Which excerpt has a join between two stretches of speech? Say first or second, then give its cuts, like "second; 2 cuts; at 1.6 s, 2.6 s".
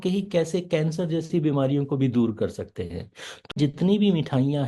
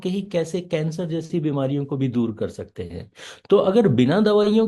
first; 1 cut; at 3.5 s